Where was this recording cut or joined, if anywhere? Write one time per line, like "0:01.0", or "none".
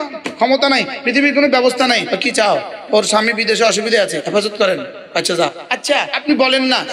0:02.1
0:06.0